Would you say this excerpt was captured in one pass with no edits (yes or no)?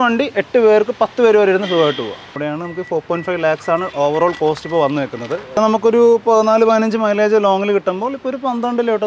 no